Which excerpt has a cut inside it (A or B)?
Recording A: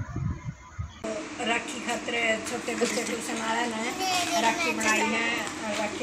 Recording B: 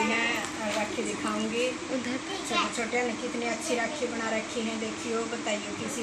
A